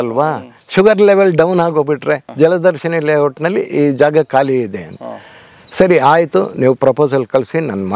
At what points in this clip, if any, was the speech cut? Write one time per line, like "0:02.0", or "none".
0:02.3